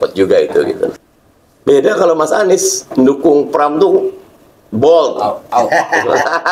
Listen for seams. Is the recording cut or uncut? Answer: cut